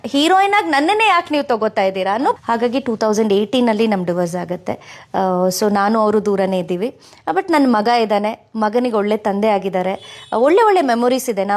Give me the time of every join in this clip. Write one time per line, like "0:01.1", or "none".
0:02.4